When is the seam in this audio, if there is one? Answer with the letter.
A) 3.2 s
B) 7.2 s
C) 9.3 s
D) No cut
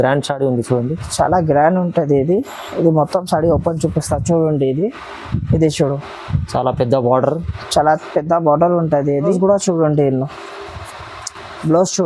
C